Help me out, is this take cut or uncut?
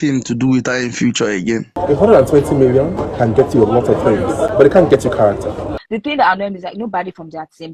cut